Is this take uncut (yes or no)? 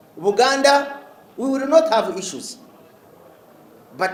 yes